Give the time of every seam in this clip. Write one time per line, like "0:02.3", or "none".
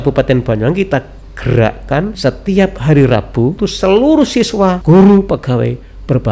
0:02.2
0:03.6
0:04.8